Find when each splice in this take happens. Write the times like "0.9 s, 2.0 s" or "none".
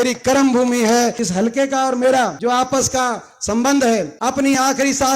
1.2 s, 2.4 s, 4.1 s